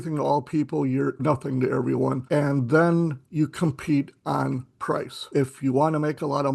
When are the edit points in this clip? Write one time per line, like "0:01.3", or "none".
0:01.2
0:02.2
0:05.3